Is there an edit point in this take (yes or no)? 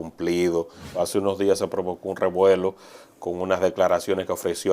yes